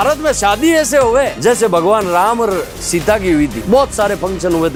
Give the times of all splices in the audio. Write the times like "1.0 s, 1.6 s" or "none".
none